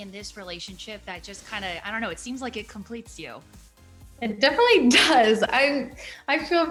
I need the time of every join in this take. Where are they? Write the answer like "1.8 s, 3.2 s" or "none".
none